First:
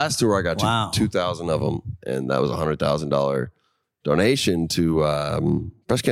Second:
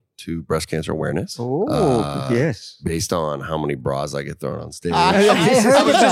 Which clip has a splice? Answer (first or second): second